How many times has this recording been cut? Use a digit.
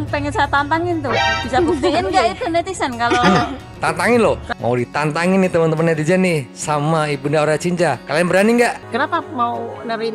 2